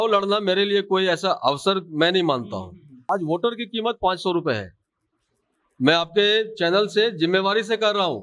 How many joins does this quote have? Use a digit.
1